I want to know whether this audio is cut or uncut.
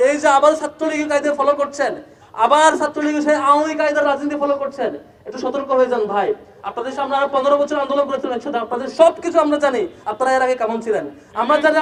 uncut